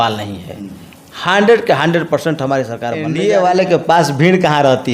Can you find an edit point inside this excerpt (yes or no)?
yes